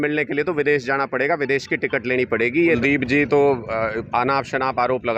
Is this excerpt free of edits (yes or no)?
no